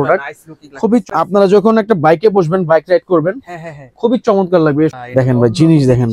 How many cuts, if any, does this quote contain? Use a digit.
2